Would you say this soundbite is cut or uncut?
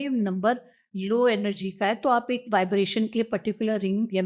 cut